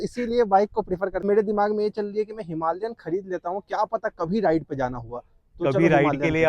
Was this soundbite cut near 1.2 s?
yes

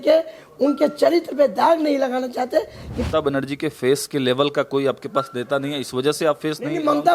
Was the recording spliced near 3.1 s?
yes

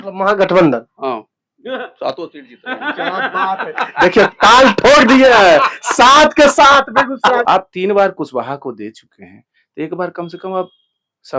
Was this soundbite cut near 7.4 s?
yes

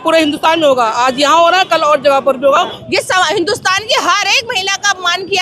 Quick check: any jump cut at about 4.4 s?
no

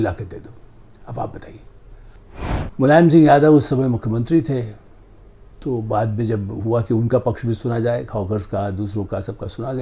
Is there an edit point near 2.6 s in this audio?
yes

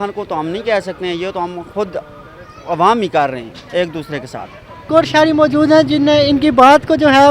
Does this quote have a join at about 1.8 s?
no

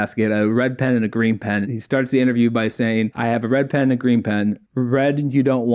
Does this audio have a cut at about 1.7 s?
yes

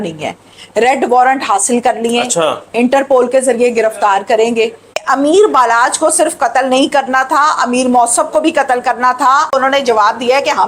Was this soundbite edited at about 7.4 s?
no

